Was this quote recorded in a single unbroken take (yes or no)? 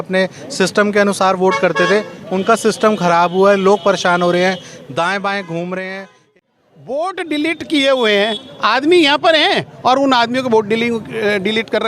no